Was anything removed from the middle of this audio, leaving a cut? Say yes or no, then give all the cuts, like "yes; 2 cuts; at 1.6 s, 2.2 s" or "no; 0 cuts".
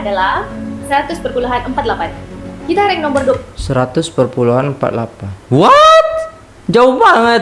no; 0 cuts